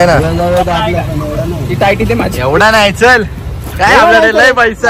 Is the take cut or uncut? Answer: uncut